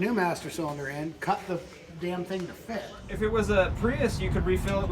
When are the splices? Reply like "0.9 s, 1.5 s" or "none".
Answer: 2.9 s